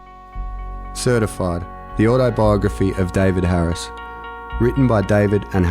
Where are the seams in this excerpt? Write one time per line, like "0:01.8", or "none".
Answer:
0:01.0